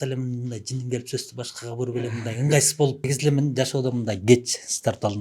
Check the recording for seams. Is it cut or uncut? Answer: cut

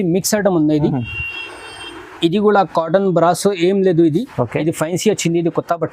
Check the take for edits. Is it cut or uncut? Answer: uncut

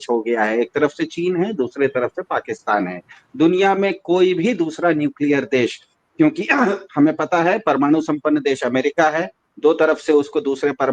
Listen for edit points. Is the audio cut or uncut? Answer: uncut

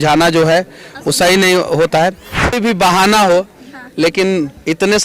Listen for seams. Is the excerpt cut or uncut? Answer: cut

